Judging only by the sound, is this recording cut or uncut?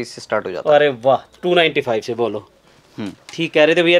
uncut